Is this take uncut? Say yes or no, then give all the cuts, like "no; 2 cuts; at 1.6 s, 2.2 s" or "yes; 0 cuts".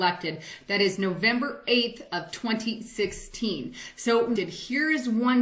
yes; 0 cuts